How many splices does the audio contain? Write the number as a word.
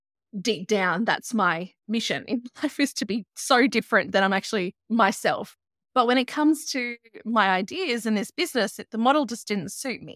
three